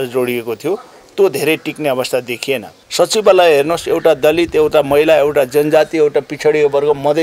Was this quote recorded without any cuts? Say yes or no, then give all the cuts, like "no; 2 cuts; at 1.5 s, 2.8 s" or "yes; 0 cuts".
no; 1 cut; at 2.8 s